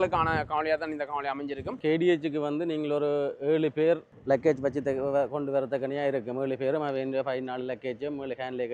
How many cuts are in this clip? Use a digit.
2